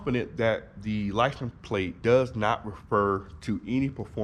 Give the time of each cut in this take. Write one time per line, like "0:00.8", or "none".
none